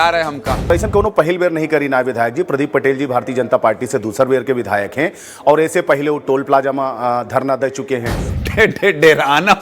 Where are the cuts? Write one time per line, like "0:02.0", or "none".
0:00.7
0:08.2